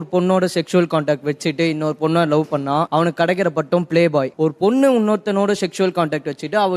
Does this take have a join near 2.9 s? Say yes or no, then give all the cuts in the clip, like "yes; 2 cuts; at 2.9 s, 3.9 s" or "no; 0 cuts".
yes; 2 cuts; at 2.9 s, 4.3 s